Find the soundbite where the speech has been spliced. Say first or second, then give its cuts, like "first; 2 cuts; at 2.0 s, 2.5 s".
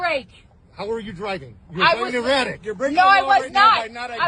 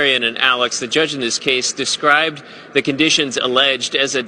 first; 1 cut; at 3.0 s